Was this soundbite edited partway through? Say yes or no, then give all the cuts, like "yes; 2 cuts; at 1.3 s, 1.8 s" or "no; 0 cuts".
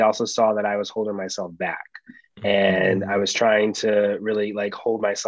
no; 0 cuts